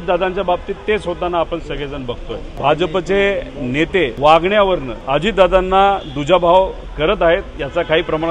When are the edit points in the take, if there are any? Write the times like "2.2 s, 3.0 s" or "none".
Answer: 2.5 s, 4.1 s, 4.9 s